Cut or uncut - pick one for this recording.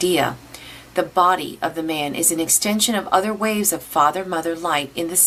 uncut